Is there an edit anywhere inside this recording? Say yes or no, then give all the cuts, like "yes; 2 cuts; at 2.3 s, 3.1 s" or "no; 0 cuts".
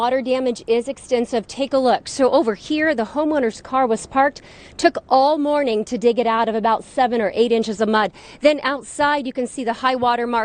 no; 0 cuts